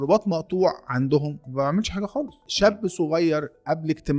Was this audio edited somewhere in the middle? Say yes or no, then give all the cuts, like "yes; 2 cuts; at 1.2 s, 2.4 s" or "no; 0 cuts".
yes; 1 cut; at 2.4 s